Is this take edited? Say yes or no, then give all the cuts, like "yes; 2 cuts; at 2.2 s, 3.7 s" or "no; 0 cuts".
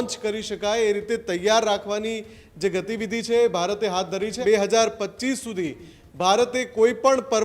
yes; 1 cut; at 4.4 s